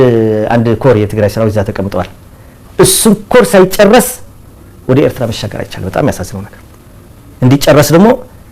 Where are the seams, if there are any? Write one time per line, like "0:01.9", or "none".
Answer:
none

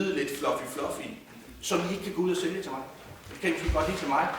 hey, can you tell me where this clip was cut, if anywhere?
0:01.5

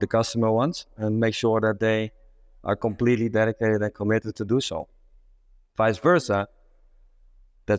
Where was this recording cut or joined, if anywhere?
none

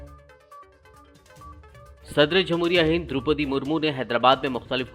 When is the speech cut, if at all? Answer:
0:01.5

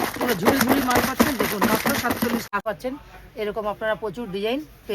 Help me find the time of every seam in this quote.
0:02.5

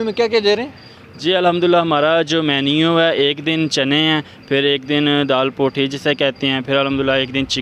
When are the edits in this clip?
none

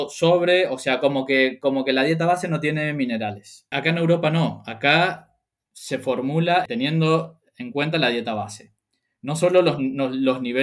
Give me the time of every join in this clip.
0:03.7
0:06.6

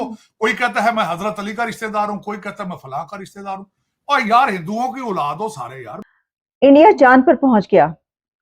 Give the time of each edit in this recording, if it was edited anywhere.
0:05.9

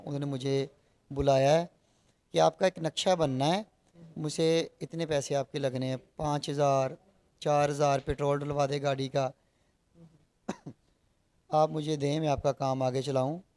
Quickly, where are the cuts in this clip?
none

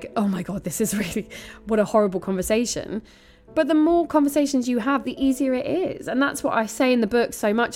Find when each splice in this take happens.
0:05.0

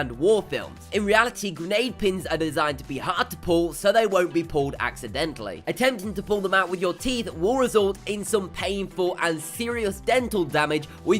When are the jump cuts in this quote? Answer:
0:04.8

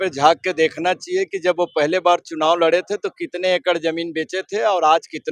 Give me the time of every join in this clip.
none

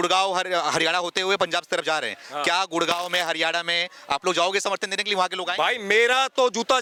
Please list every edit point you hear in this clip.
none

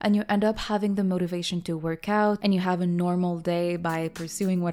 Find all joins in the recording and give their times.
0:02.4

